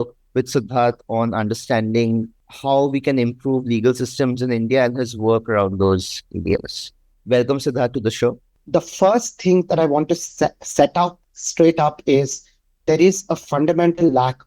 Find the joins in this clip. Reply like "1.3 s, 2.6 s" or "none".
2.4 s, 8.6 s